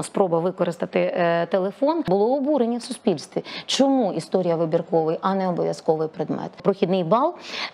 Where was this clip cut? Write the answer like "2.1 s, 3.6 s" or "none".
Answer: 2.1 s, 6.6 s